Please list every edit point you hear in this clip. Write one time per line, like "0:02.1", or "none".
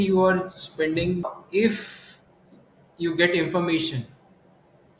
0:01.4